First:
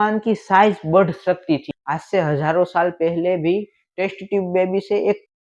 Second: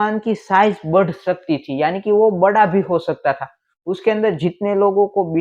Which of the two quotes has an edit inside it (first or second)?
first